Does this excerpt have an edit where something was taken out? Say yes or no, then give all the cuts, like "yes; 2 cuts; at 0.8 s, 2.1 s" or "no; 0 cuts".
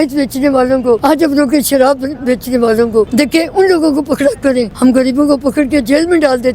yes; 3 cuts; at 1.0 s, 3.1 s, 4.7 s